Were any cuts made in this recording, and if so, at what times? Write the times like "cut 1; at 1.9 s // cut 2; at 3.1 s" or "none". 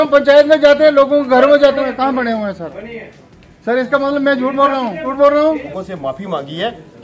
cut 1; at 1.7 s // cut 2; at 5.1 s // cut 3; at 5.7 s